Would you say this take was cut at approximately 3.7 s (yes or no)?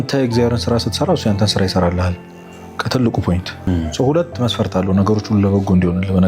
yes